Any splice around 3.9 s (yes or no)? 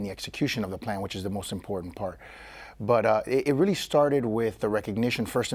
no